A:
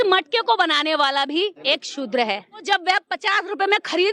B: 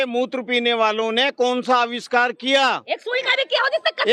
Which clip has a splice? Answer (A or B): A